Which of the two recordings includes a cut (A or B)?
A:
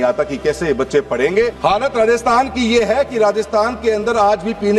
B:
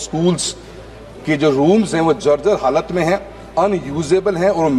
A